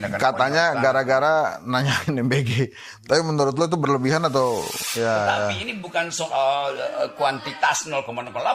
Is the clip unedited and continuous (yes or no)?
no